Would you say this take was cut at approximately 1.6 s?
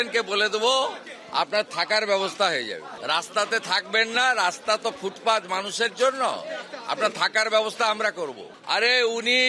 no; 2 cuts; at 2.9 s, 8.5 s

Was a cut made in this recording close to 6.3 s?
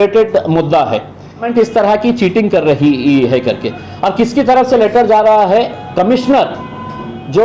no; 1 cut; at 1.4 s

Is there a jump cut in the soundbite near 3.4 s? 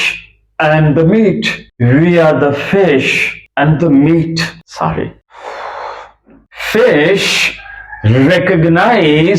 no; 1 cut; at 6.5 s

